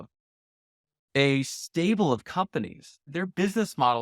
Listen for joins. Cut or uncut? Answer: cut